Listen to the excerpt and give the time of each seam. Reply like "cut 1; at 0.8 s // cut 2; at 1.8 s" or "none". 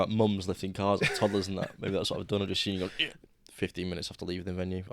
cut 1; at 3.1 s